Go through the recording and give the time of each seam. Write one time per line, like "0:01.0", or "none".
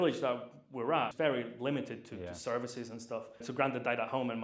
0:01.1
0:03.4